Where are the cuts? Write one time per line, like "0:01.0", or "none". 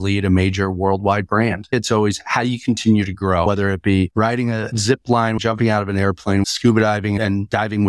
0:01.7
0:03.4
0:05.4
0:06.5

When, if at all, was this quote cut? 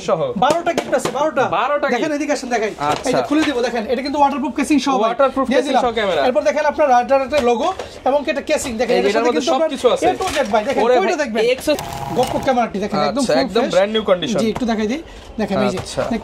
0:11.8

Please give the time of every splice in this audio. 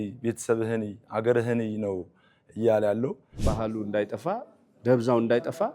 0:03.3

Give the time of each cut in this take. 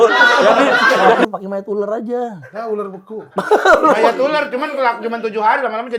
0:01.2

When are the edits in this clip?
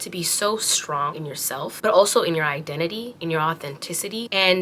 0:03.1

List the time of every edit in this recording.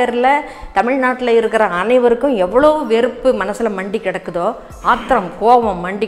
none

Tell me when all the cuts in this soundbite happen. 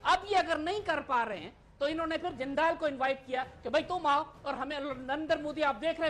none

